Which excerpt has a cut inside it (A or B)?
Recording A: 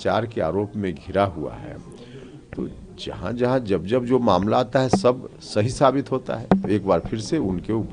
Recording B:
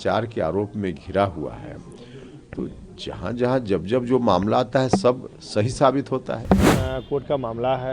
B